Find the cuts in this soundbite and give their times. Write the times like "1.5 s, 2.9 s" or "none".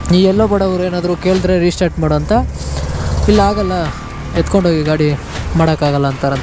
none